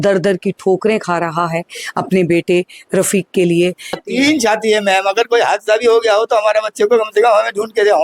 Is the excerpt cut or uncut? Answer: cut